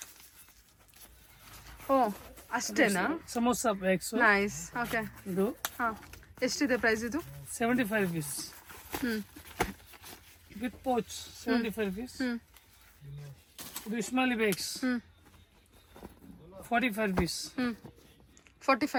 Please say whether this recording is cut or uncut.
uncut